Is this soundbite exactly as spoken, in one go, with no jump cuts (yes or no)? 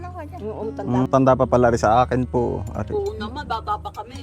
no